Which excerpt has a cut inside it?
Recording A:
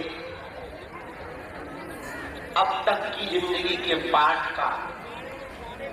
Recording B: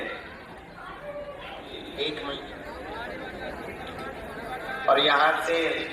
B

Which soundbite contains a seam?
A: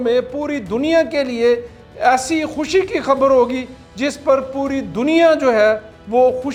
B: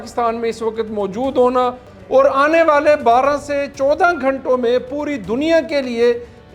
B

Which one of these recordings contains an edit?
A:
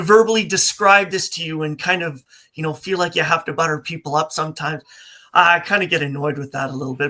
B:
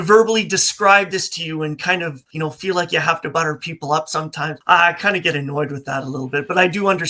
B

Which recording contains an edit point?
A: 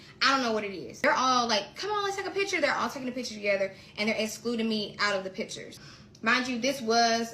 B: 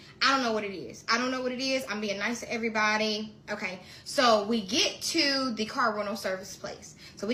A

